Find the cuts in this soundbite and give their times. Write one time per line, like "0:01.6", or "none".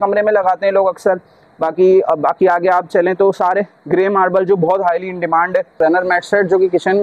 0:05.8